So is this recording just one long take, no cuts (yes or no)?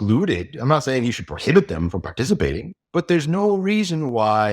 no